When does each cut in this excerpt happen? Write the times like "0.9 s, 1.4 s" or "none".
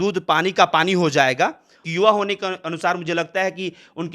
1.9 s

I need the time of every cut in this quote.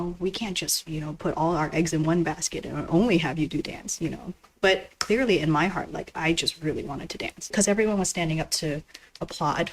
7.5 s

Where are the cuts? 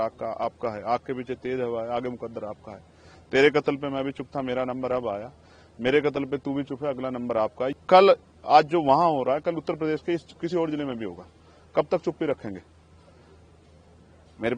7.7 s

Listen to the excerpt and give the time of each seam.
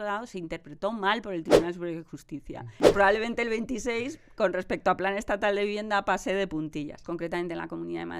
2.9 s, 7.0 s

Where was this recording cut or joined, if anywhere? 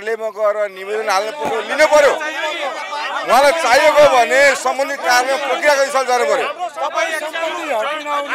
none

